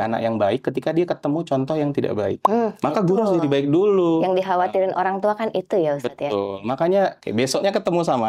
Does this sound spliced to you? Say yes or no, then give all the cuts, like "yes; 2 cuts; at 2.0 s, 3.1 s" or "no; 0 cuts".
yes; 1 cut; at 7.2 s